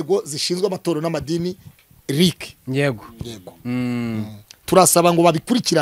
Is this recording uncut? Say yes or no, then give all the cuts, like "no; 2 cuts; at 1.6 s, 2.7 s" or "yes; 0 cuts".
yes; 0 cuts